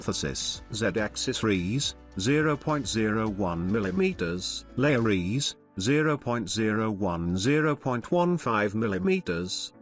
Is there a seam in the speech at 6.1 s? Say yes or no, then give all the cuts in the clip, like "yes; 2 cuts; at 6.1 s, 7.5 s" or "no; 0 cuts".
no; 1 cut; at 7.4 s